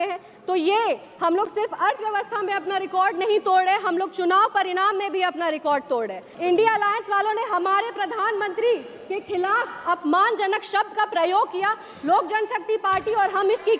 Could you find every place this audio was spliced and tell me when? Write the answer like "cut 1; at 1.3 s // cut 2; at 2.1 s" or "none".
cut 1; at 6.2 s